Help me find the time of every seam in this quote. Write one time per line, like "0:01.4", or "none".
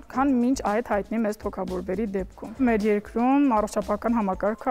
0:02.6